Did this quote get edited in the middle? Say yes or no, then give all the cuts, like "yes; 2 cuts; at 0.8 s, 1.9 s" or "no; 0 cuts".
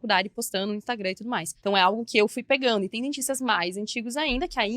yes; 1 cut; at 1.5 s